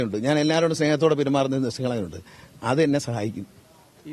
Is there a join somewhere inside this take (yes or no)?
no